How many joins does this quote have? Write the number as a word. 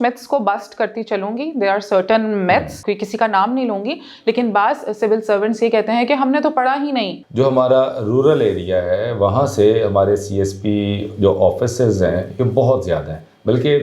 two